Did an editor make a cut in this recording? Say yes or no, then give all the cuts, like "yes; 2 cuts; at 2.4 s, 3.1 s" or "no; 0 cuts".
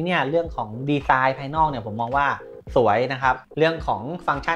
yes; 1 cut; at 3.4 s